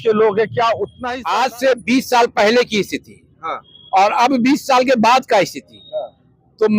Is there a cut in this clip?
yes; 1 cut; at 0.9 s

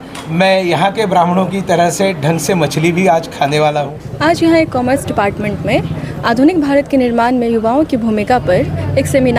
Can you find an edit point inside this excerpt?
yes; 1 cut; at 4.0 s

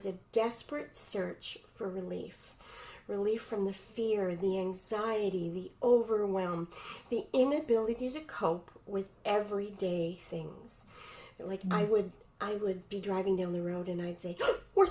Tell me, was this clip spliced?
no; 0 cuts

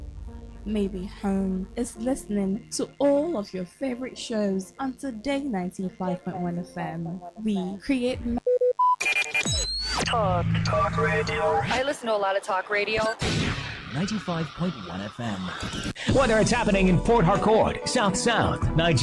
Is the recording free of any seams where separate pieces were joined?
no; 2 cuts; at 8.4 s, 15.8 s

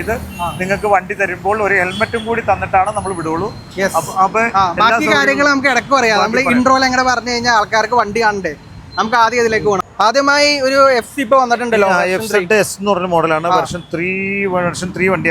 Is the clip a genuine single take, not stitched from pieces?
yes; 0 cuts

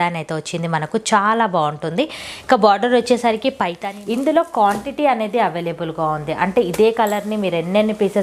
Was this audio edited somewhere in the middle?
yes; 1 cut; at 3.8 s

